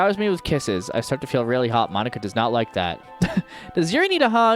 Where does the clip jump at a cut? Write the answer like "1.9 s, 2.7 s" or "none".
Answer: 3.1 s